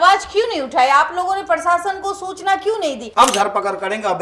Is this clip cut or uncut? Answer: cut